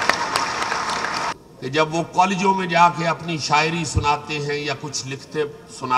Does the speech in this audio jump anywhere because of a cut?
yes; 1 cut; at 1.3 s

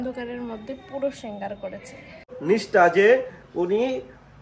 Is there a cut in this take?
yes; 1 cut; at 2.3 s

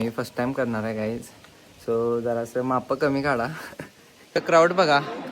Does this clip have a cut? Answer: yes; 1 cut; at 4.3 s

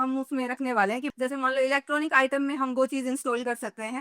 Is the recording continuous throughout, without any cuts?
no; 1 cut; at 1.1 s

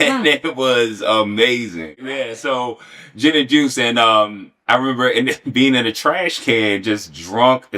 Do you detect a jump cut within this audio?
yes; 1 cut; at 1.9 s

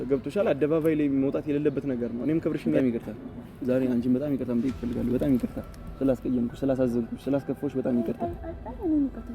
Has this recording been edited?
yes; 1 cut; at 2.8 s

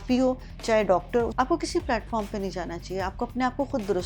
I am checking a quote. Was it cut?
yes; 1 cut; at 1.3 s

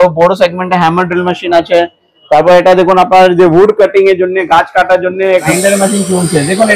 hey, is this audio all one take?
no; 1 cut; at 5.5 s

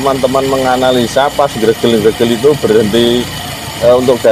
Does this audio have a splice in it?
no; 0 cuts

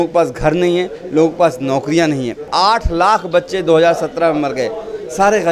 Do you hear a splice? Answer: yes; 1 cut; at 2.5 s

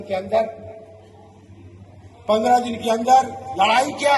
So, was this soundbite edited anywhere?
no; 0 cuts

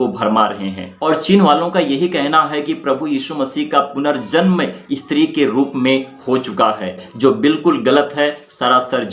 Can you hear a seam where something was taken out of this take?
no; 0 cuts

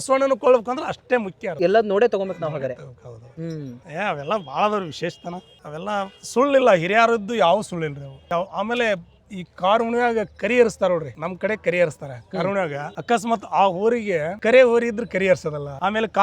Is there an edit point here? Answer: no; 0 cuts

